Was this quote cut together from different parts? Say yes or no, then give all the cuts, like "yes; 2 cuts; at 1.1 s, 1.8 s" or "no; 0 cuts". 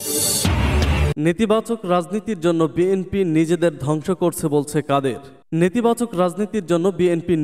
yes; 1 cut; at 1.1 s